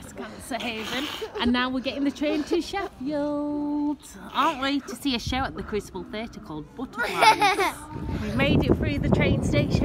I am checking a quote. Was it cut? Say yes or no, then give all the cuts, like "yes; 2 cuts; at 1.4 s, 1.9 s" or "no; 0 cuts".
no; 0 cuts